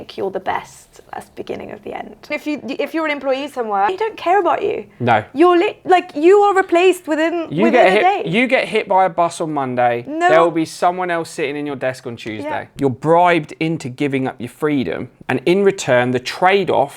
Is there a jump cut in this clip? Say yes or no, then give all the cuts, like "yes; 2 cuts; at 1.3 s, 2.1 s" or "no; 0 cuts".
yes; 4 cuts; at 2.3 s, 3.9 s, 12.6 s, 15.1 s